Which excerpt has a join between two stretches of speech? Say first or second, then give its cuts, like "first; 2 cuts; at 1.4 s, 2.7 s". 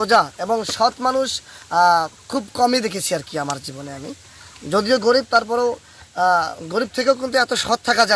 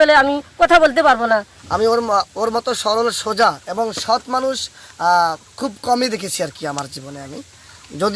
second; 1 cut; at 1.6 s